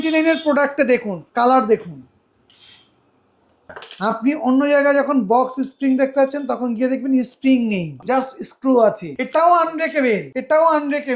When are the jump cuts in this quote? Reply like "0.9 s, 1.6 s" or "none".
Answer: 1.2 s, 3.5 s, 7.9 s, 9.1 s, 10.3 s